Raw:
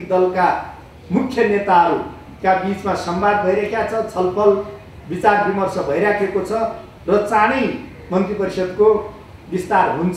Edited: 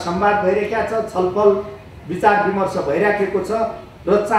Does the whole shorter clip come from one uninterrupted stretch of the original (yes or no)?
yes